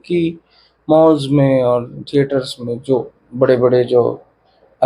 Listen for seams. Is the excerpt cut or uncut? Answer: uncut